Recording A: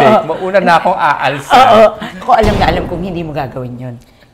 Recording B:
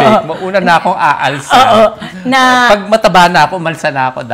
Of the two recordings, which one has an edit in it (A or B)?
A